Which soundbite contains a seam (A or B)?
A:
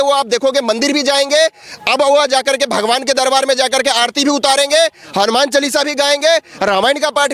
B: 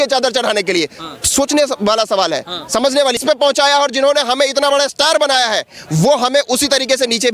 B